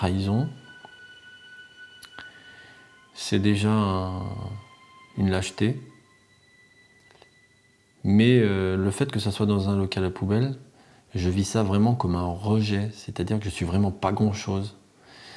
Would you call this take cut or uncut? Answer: uncut